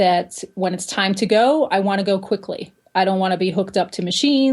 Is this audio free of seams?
yes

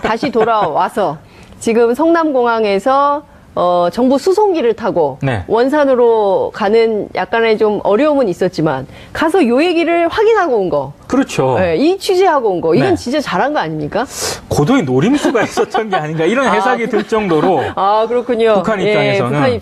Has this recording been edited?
yes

